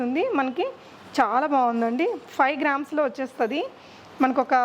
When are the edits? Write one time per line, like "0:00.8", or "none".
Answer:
none